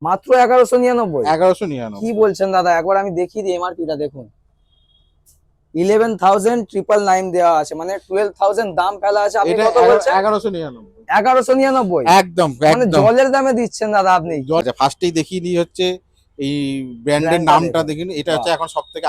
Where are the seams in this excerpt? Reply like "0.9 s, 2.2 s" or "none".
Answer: 14.6 s